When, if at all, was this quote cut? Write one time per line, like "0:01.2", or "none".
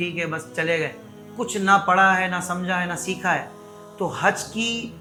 none